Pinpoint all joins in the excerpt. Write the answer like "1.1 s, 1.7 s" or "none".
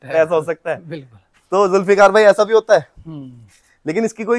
none